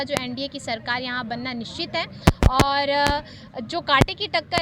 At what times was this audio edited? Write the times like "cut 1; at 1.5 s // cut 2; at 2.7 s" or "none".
none